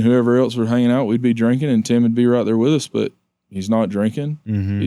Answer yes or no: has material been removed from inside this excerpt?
no